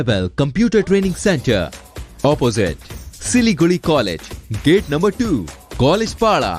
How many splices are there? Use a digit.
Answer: 0